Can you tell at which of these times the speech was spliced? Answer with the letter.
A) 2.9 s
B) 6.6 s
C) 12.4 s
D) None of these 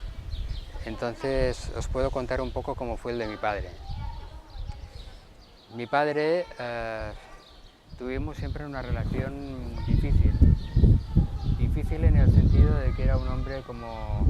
C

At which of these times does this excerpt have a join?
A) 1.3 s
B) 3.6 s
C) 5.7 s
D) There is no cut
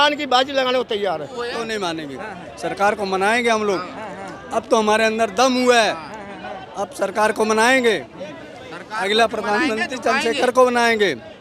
A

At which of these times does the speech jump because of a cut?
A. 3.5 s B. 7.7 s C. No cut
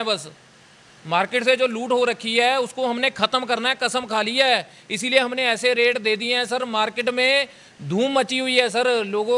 C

